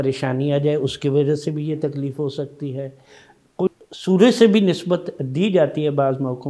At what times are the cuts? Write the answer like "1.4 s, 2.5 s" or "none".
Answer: 3.7 s